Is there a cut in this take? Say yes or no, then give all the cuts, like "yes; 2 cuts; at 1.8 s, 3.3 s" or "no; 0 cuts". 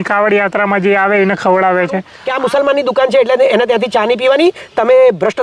yes; 1 cut; at 2.2 s